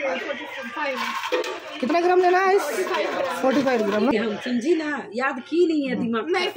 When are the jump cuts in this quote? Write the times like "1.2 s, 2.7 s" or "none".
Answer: 4.1 s